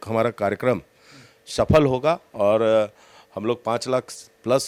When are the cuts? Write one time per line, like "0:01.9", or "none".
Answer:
none